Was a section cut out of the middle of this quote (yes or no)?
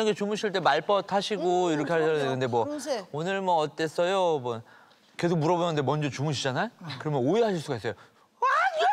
no